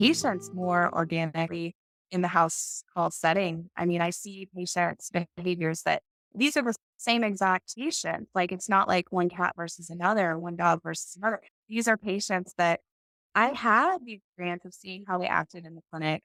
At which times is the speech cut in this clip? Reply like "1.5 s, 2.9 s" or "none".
none